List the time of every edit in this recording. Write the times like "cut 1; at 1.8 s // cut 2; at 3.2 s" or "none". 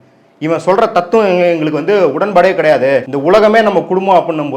cut 1; at 3.1 s